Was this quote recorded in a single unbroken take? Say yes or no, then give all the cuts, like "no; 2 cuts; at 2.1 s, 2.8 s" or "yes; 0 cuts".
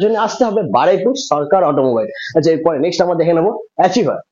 yes; 0 cuts